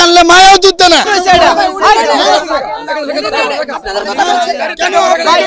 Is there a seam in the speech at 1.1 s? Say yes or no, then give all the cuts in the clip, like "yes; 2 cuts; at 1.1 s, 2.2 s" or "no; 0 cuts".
yes; 1 cut; at 1.1 s